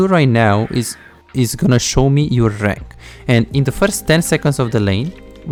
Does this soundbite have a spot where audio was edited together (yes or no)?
no